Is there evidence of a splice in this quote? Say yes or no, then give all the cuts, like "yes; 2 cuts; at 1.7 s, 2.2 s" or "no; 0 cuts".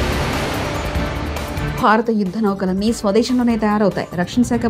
yes; 1 cut; at 1.4 s